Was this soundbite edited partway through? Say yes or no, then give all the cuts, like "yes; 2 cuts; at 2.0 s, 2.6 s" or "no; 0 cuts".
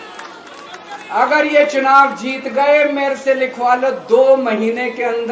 no; 0 cuts